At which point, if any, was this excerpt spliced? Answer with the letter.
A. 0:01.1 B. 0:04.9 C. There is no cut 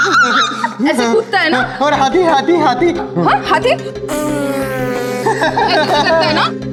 C